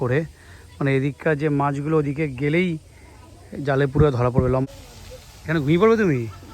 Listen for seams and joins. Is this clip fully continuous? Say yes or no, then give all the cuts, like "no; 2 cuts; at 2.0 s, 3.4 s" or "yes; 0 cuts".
no; 1 cut; at 4.7 s